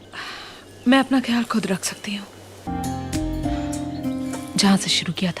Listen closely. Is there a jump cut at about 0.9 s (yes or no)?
no